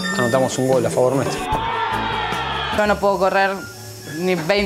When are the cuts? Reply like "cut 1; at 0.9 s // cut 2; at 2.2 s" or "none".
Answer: cut 1; at 2.7 s